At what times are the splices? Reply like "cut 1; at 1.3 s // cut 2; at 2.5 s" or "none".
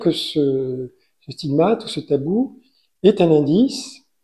none

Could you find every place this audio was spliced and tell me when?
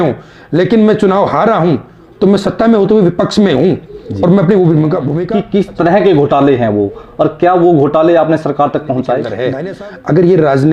cut 1; at 5.2 s // cut 2; at 9.4 s

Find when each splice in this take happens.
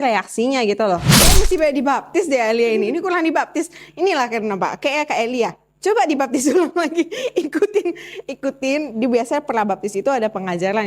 cut 1; at 1.2 s

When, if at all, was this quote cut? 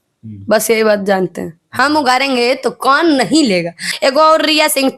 cut 1; at 3.9 s

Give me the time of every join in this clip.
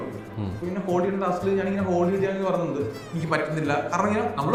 none

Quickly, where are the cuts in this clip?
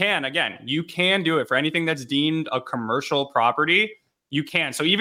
none

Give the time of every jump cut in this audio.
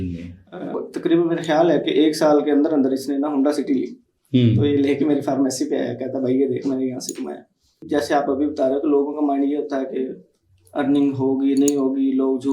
cut 1; at 0.8 s // cut 2; at 7.8 s

